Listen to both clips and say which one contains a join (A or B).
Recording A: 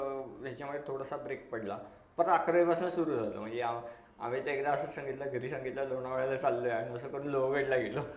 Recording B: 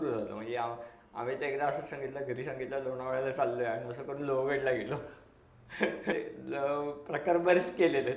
B